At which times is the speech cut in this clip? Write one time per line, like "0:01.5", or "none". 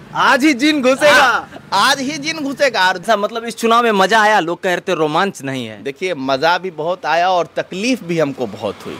0:03.0